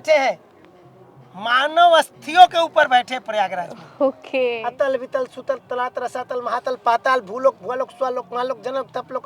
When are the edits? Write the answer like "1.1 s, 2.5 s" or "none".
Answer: 4.6 s